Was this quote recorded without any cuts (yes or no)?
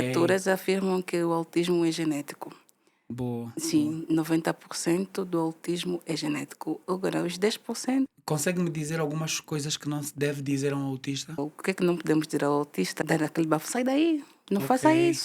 no